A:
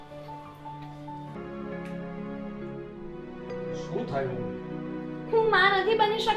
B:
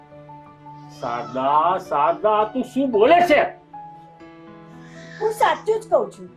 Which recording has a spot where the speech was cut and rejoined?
B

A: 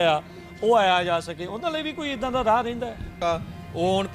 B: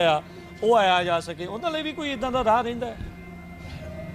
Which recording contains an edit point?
A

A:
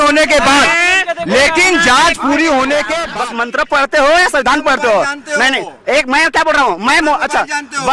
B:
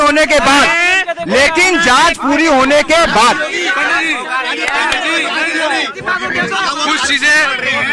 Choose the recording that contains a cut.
A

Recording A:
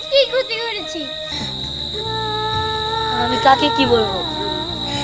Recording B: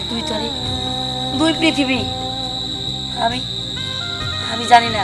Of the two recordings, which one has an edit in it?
A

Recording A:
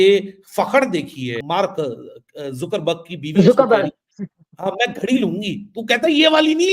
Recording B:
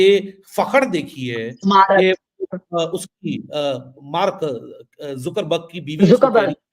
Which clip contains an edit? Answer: A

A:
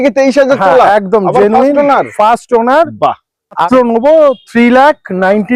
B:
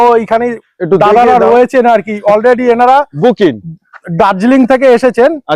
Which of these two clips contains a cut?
A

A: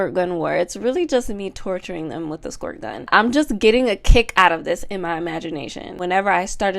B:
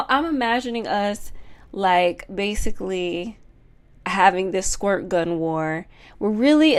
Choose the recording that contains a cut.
A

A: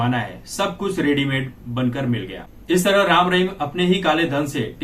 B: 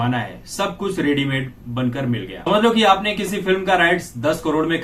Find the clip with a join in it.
A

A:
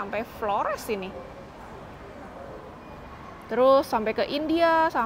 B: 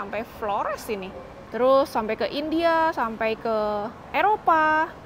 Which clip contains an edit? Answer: B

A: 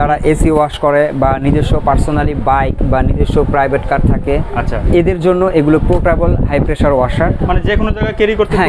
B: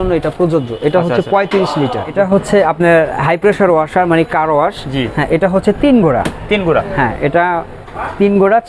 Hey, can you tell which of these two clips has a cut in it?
B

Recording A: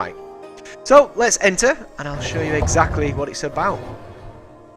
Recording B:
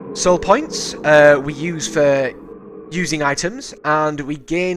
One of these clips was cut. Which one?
A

